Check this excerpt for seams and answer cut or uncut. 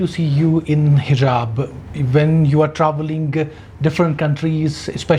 uncut